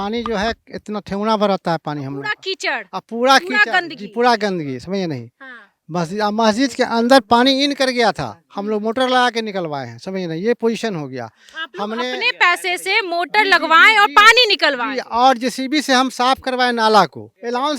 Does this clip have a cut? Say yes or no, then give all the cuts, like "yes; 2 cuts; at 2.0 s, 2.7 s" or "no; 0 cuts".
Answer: no; 0 cuts